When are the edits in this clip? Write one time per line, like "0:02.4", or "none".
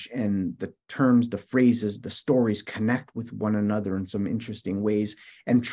none